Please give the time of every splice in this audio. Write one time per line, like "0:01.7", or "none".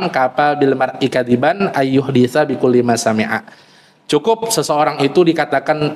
none